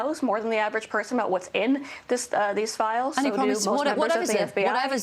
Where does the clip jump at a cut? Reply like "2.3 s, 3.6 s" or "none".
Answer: none